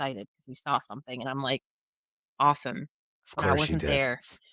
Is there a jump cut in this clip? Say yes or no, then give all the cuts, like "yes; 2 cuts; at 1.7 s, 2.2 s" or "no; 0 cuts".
no; 0 cuts